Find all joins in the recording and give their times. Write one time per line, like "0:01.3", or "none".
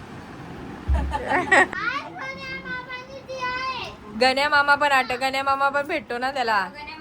0:01.7